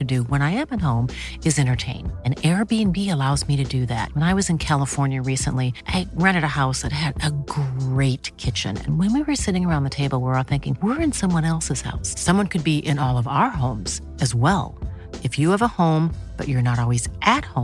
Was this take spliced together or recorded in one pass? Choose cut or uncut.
uncut